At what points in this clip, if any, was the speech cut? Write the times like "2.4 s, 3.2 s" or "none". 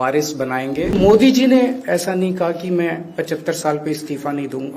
0.9 s